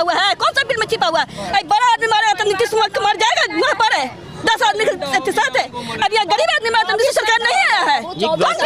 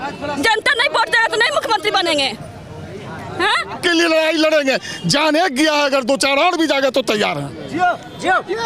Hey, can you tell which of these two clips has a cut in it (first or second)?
second